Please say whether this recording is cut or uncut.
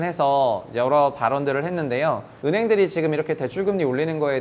cut